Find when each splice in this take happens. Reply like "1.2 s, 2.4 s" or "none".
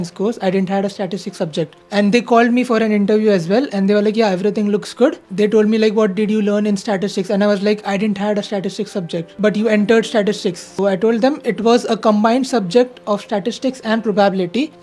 1.8 s, 5.2 s, 9.3 s, 10.7 s